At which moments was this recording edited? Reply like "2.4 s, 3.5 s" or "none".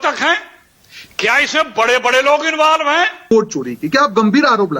3.3 s